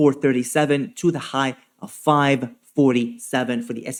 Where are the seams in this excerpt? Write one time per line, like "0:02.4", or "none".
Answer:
none